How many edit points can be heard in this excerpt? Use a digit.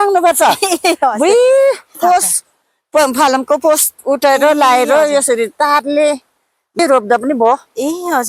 1